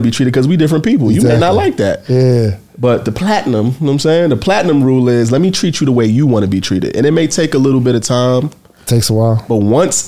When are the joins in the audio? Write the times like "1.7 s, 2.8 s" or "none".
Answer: none